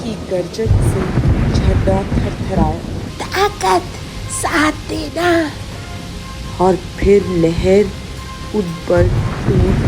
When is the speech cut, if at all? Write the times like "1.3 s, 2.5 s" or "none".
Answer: 3.0 s